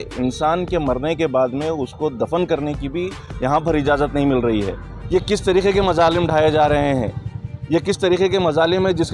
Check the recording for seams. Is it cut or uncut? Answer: cut